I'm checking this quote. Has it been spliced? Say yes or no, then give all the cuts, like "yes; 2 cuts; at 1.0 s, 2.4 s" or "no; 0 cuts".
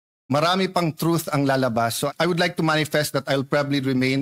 yes; 1 cut; at 2.0 s